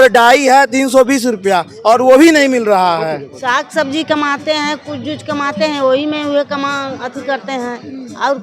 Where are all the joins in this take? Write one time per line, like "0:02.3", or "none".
0:03.3

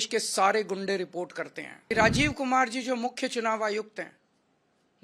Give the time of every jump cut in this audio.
0:01.8

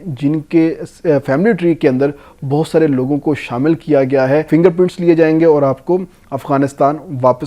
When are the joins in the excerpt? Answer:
0:04.5

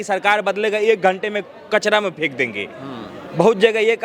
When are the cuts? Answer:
none

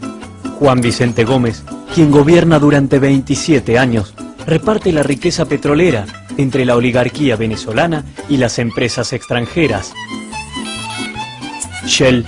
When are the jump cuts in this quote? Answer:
none

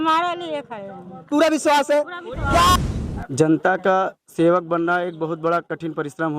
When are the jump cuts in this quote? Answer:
0:02.8

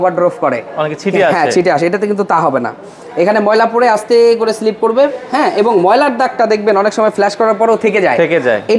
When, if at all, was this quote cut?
none

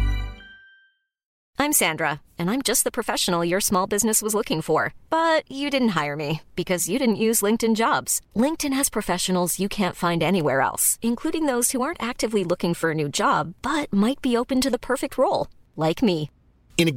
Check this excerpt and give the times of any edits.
0:01.4

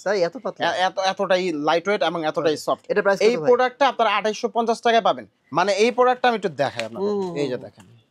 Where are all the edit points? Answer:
0:05.3

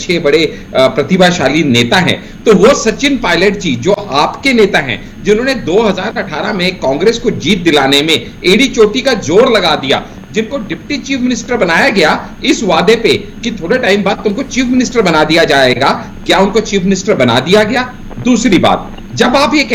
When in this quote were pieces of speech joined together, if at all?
none

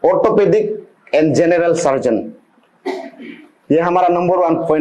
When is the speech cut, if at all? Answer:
none

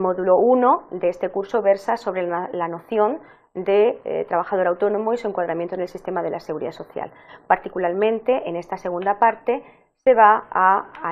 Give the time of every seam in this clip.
0:03.8

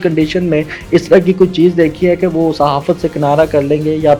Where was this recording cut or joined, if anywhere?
none

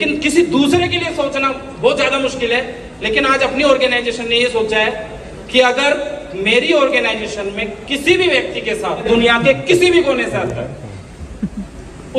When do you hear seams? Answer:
0:09.0

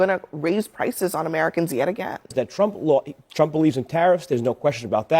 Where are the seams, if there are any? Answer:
0:02.3

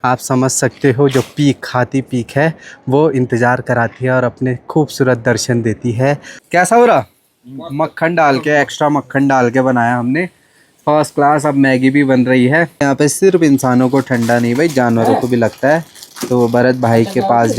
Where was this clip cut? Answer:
0:06.3
0:12.8

